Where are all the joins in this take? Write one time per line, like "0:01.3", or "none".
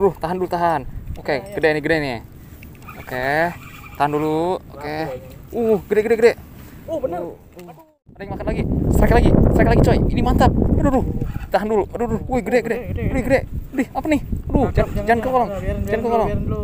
0:07.5